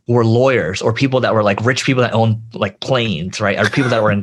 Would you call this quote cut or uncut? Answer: uncut